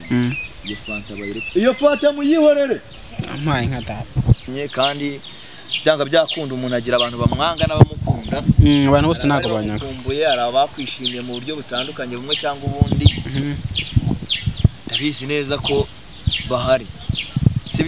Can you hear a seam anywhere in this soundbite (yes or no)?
yes